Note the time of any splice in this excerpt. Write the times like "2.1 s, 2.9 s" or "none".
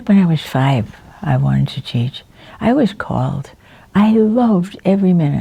none

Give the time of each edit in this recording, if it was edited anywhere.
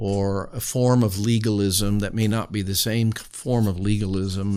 none

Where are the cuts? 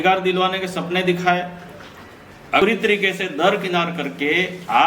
2.6 s

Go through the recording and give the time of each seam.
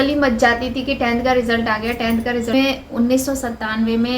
2.5 s

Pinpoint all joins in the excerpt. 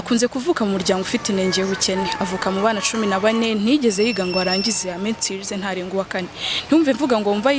none

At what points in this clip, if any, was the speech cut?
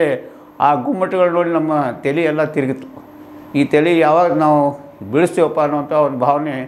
none

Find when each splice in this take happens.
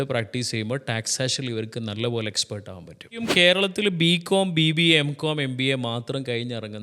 3.3 s

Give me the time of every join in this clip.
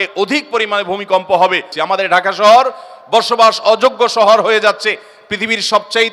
1.7 s

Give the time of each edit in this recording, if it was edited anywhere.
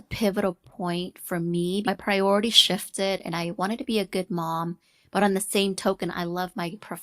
1.9 s

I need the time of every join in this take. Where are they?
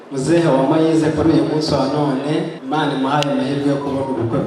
2.6 s

